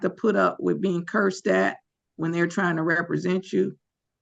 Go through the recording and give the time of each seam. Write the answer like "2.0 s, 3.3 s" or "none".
none